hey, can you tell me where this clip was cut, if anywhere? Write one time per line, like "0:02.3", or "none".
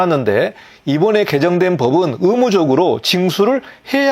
none